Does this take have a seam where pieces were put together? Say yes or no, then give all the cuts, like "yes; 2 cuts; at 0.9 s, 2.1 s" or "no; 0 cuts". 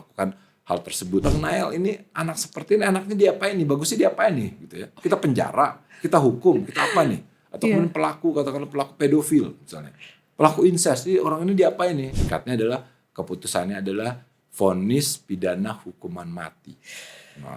yes; 2 cuts; at 1.2 s, 12.1 s